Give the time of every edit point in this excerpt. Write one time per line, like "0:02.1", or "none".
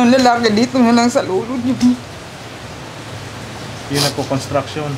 none